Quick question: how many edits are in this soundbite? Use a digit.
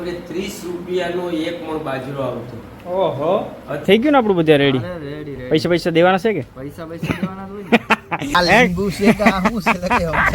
2